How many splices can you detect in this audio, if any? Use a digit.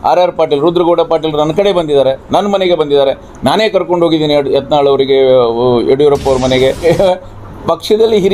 1